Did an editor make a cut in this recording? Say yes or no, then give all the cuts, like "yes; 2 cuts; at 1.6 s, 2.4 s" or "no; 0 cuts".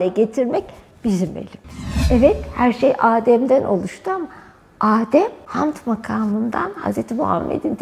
yes; 2 cuts; at 1.9 s, 5.4 s